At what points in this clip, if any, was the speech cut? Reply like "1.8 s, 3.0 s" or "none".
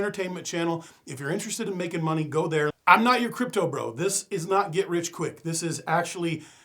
2.8 s